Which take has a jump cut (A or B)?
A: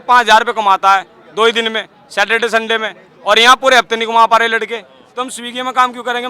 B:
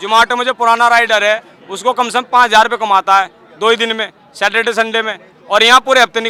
A